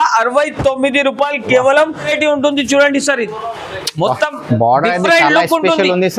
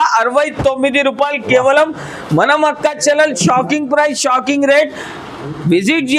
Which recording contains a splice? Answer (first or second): first